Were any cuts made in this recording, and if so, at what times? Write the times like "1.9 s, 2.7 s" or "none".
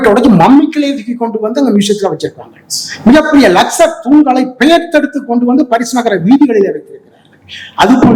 none